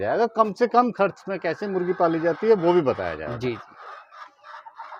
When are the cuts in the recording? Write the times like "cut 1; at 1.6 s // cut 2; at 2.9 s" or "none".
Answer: none